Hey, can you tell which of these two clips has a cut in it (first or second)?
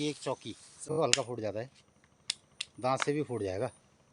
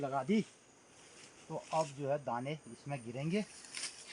first